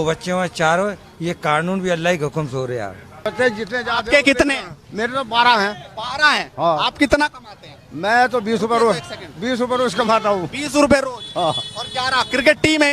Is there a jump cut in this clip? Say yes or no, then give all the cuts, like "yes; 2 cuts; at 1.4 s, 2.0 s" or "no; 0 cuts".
yes; 1 cut; at 3.1 s